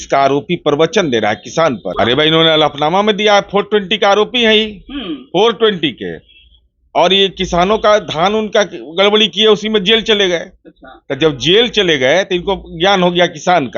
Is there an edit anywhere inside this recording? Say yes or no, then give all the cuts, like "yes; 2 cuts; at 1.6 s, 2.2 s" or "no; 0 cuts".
yes; 1 cut; at 1.9 s